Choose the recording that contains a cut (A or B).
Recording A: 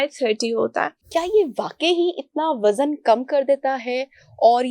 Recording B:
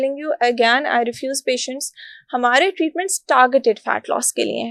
A